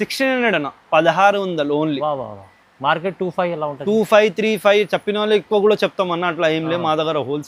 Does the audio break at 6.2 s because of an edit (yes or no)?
no